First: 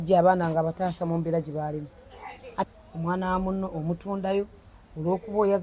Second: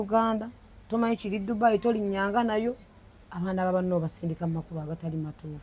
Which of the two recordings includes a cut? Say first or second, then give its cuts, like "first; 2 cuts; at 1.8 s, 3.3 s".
first; 1 cut; at 2.7 s